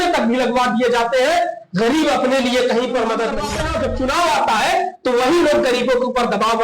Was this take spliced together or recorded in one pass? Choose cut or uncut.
cut